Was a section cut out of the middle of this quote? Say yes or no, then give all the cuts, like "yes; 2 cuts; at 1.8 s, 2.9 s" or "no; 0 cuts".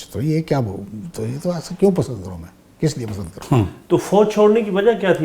yes; 1 cut; at 3.3 s